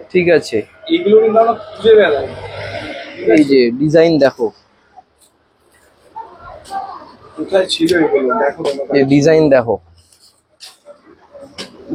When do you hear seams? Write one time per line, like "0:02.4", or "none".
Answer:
none